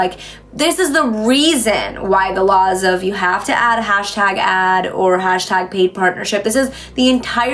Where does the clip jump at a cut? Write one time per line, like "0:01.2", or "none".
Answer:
none